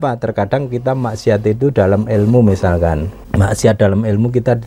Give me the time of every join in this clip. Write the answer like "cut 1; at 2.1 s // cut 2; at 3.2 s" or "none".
cut 1; at 3.2 s